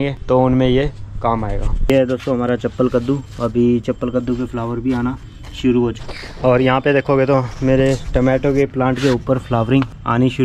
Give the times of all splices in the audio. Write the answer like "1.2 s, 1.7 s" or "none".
1.9 s, 6.0 s